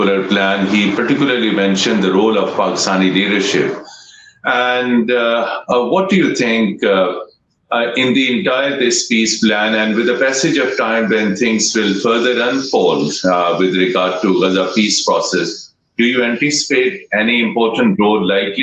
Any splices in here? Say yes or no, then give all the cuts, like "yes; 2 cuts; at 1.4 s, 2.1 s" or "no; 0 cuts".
no; 0 cuts